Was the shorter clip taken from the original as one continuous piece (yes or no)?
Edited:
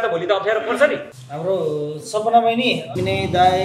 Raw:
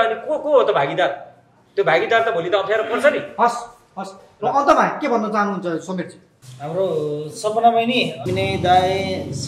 no